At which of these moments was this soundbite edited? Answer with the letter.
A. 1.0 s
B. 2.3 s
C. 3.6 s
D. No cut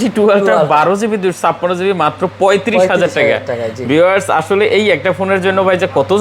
D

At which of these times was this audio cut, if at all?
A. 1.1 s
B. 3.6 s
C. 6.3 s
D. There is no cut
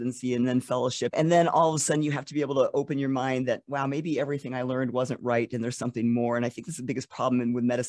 A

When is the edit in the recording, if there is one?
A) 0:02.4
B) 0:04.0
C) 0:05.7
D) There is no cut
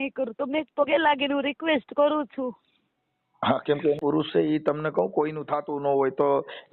B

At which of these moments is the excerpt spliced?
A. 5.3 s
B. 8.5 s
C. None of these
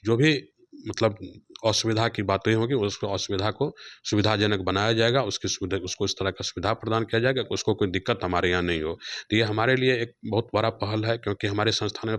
C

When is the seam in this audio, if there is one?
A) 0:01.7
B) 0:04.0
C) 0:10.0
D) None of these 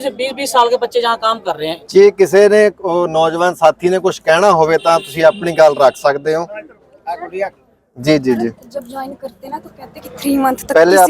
A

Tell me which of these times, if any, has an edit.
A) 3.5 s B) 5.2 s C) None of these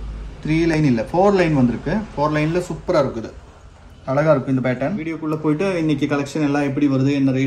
B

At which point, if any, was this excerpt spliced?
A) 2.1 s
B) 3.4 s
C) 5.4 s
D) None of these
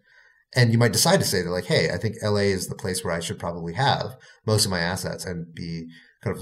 C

